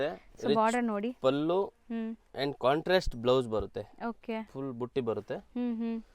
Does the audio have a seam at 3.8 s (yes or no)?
no